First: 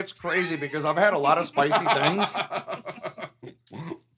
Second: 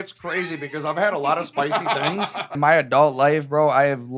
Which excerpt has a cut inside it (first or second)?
second